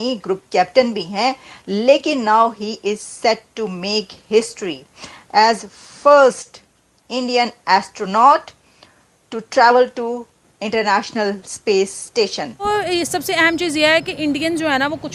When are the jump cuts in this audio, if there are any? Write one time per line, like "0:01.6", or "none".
0:12.7